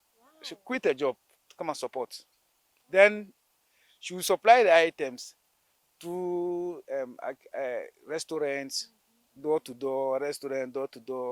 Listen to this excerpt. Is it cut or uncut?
uncut